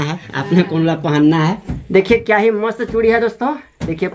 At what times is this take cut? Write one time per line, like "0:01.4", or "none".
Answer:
0:01.7

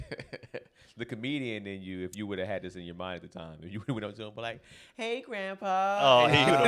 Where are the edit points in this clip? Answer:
none

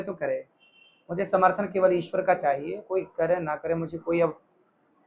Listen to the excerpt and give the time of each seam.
none

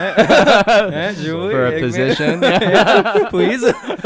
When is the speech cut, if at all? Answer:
none

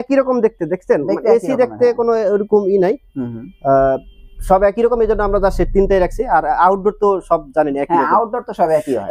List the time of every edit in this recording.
none

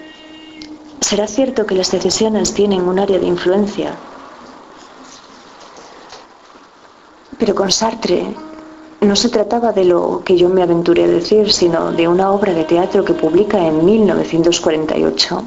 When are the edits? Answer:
none

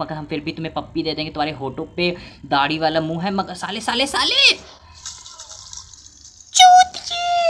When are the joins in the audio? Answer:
none

